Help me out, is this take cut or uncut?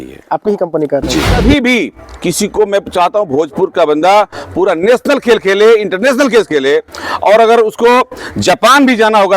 cut